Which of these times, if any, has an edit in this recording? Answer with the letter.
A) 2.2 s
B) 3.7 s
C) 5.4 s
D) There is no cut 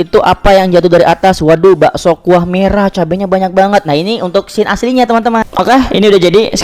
C